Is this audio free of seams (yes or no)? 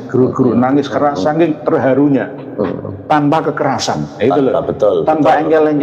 yes